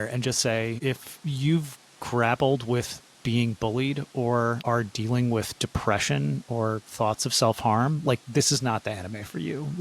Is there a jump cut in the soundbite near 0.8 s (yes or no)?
yes